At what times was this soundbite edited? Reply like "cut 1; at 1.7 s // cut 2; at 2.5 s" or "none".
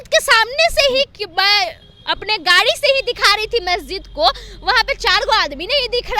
none